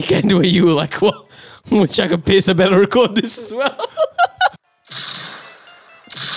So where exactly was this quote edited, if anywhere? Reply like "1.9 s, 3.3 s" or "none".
4.6 s